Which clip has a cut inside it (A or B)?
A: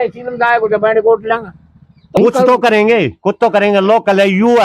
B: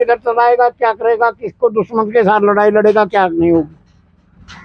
A